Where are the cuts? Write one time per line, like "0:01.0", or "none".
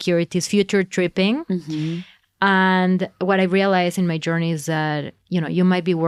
none